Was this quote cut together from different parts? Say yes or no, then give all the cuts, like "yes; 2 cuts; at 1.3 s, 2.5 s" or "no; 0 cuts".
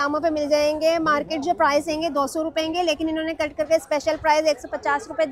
no; 0 cuts